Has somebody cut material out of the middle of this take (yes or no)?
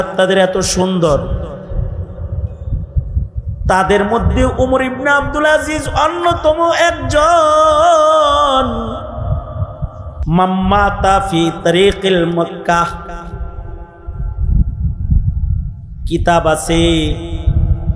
yes